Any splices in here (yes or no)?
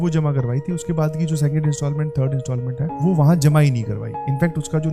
no